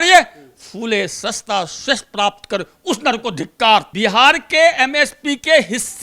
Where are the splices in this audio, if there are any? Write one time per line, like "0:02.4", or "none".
0:03.9